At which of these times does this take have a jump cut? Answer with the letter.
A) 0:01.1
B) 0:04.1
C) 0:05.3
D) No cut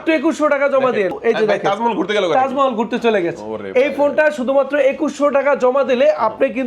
A